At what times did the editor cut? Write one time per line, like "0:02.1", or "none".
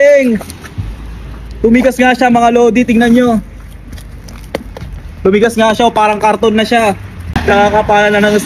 0:07.3